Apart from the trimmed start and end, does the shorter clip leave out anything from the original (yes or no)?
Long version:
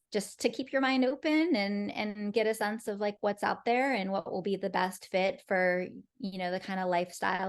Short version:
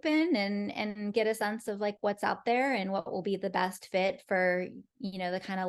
no